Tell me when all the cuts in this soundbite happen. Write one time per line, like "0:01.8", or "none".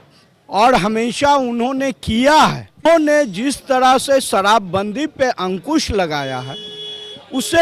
0:02.8